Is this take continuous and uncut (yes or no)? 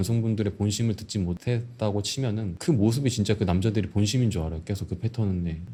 yes